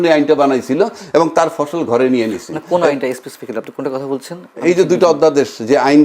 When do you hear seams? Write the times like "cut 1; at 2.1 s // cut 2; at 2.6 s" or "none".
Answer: none